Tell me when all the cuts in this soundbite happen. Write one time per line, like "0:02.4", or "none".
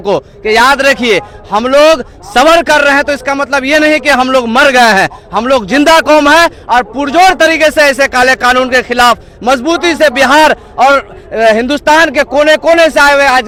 none